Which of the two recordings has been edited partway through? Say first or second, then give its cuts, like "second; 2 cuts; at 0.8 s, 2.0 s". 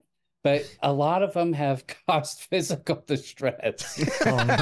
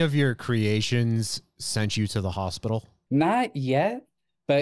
second; 1 cut; at 2.9 s